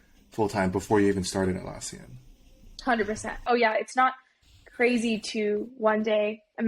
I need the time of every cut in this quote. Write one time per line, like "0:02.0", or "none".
0:03.4